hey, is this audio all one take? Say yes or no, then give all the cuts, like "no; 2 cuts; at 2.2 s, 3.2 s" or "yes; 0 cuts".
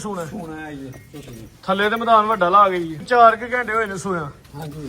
no; 1 cut; at 3.0 s